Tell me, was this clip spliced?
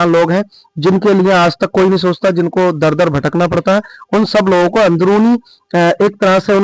no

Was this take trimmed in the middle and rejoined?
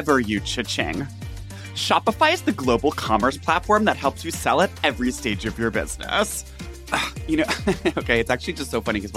yes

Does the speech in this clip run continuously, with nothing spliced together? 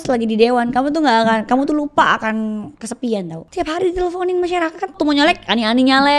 no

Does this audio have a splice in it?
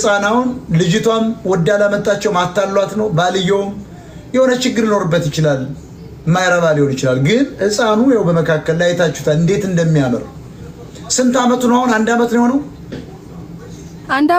no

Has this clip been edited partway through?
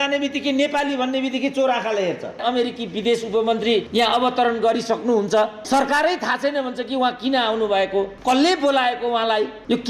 yes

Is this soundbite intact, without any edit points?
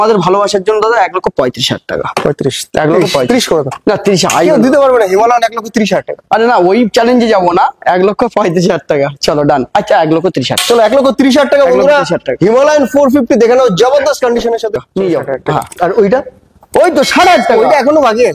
no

